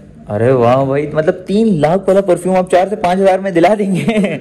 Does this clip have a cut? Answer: no; 0 cuts

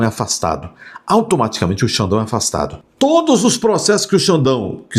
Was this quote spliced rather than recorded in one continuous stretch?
yes; 1 cut; at 2.8 s

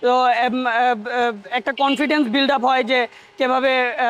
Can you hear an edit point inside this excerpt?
no; 0 cuts

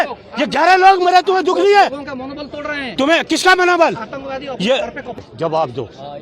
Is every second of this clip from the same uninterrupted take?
no; 1 cut; at 5.2 s

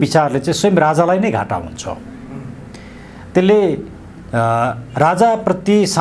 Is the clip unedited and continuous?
yes; 0 cuts

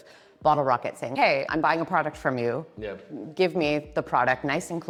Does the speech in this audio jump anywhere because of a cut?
no; 0 cuts

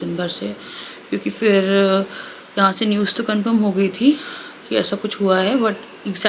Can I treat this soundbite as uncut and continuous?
yes; 0 cuts

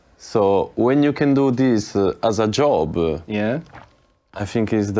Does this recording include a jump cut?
no; 0 cuts

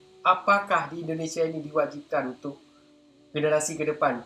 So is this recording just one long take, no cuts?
yes; 0 cuts

